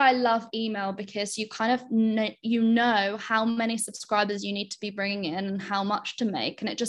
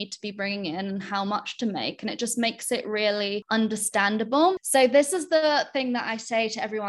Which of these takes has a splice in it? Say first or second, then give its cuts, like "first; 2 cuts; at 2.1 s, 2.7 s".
second; 2 cuts; at 3.4 s, 4.6 s